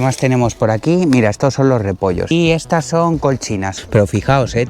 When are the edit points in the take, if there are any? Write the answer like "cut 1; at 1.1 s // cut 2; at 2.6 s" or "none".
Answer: cut 1; at 2.3 s // cut 2; at 3.8 s